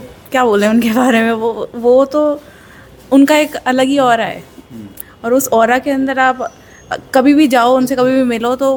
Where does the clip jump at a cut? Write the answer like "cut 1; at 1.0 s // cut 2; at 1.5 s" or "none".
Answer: none